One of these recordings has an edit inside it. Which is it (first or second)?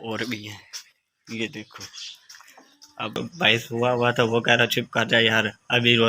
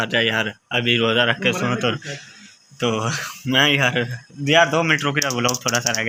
first